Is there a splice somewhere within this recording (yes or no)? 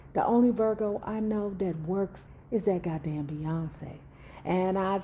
yes